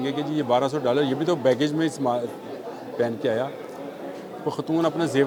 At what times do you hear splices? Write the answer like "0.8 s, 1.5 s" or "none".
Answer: none